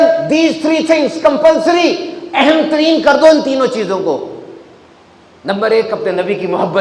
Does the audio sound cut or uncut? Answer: uncut